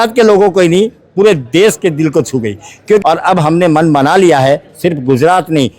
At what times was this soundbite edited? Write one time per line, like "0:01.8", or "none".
0:03.0